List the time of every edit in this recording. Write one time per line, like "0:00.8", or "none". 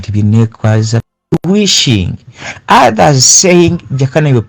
0:01.5